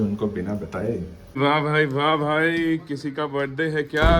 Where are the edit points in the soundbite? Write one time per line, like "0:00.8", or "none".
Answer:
0:01.4